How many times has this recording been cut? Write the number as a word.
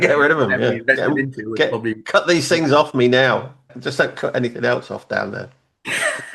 one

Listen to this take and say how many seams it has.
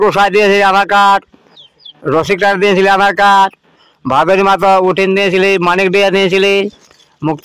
zero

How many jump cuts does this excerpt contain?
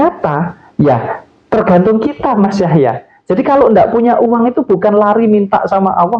zero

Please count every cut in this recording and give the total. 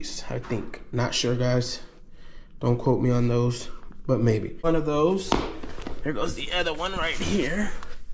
one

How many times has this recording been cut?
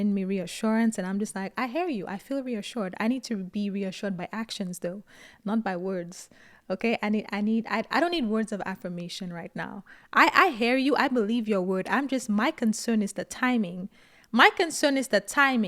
zero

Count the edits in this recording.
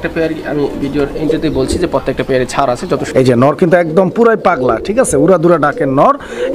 one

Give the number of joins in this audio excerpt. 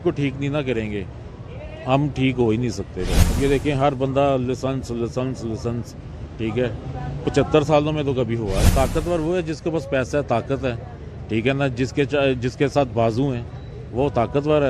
two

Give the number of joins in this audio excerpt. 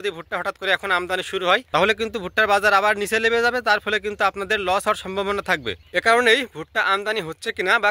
two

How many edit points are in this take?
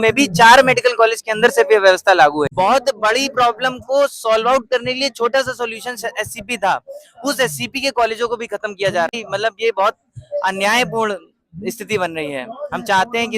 two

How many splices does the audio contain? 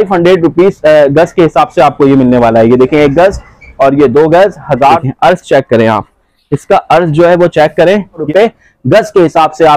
two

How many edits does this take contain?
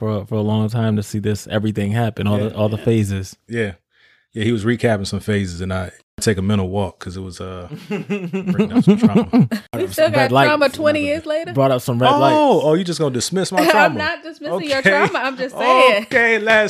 two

